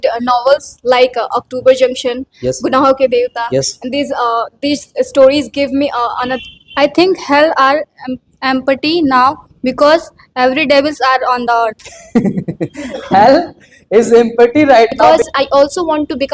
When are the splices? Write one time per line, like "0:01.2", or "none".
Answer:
0:06.4
0:15.0